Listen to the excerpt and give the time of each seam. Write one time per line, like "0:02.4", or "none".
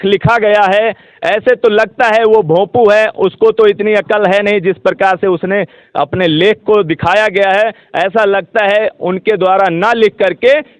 none